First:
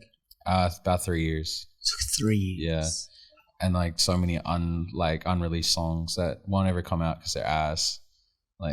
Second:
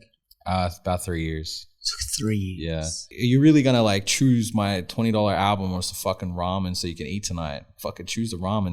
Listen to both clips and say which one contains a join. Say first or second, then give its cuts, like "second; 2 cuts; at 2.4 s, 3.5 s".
second; 1 cut; at 3.0 s